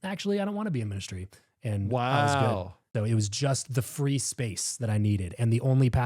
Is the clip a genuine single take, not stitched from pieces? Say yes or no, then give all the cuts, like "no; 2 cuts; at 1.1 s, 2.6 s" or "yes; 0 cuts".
no; 1 cut; at 2.8 s